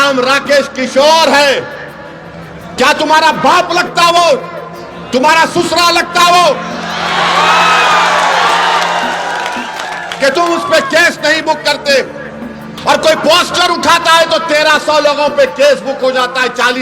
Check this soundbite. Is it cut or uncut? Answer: uncut